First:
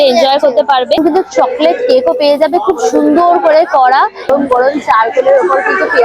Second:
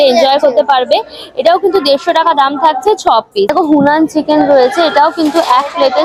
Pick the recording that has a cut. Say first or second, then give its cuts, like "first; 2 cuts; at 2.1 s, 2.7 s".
first; 2 cuts; at 1.0 s, 4.3 s